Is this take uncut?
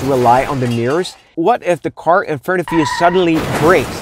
no; 1 cut; at 1.3 s

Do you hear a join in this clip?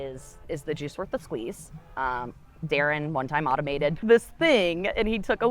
yes; 1 cut; at 4.0 s

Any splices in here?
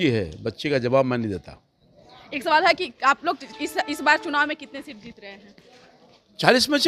no; 0 cuts

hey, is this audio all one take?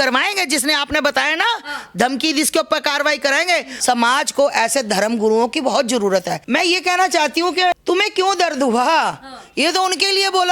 no; 3 cuts; at 3.7 s, 6.4 s, 7.8 s

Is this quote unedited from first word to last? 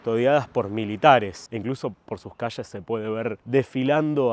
yes; 0 cuts

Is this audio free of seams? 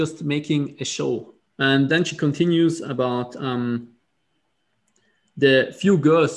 no; 1 cut; at 1.4 s

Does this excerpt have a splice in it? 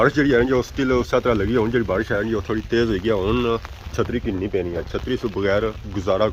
no; 0 cuts

